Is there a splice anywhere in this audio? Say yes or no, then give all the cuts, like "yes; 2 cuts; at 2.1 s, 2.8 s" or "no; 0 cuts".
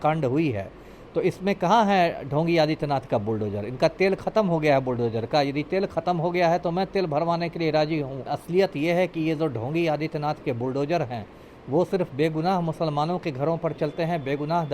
yes; 1 cut; at 8.3 s